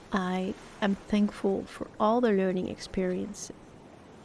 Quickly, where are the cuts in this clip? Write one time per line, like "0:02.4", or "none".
0:03.3